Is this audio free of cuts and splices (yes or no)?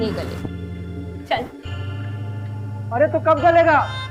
yes